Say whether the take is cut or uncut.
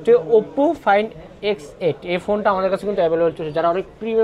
uncut